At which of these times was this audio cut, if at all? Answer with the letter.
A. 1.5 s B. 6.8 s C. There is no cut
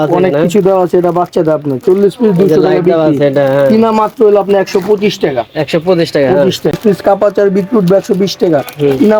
B